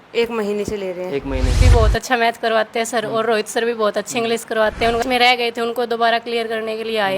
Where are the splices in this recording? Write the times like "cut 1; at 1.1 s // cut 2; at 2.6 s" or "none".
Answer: cut 1; at 1.6 s // cut 2; at 5.0 s

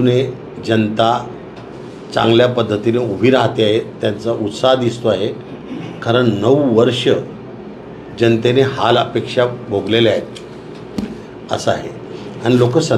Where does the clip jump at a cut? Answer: cut 1; at 11.0 s

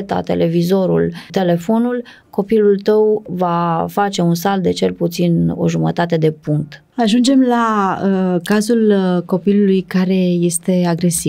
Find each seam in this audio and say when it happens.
cut 1; at 1.3 s // cut 2; at 3.3 s // cut 3; at 6.9 s

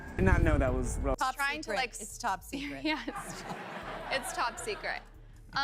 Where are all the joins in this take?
cut 1; at 1.2 s

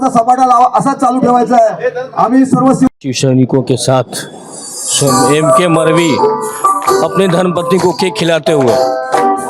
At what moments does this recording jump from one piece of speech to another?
cut 1; at 3.1 s

